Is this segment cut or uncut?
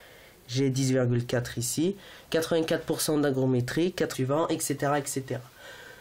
uncut